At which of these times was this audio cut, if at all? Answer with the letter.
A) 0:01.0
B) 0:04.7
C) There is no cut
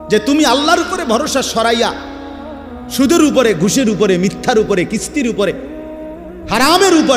C